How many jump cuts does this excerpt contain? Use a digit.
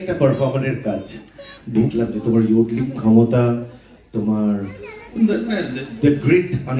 1